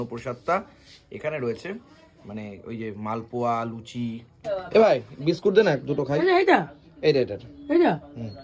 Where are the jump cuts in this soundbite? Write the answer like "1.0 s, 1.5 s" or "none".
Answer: 4.3 s